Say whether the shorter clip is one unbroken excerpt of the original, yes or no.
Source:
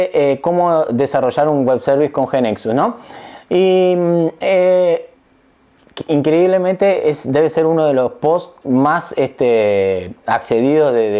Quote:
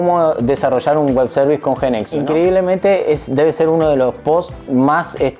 no